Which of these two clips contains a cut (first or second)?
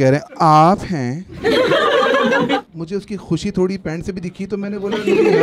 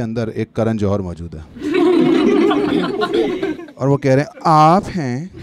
first